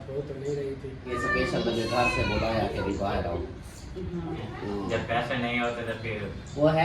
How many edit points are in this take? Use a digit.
2